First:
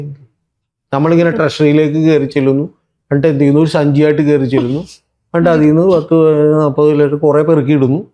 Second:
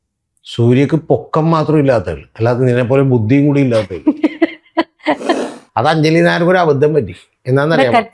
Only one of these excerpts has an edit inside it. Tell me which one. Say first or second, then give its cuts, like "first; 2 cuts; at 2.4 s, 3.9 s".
second; 1 cut; at 5.5 s